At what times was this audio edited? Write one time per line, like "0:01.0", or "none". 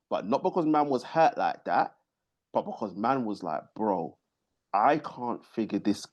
none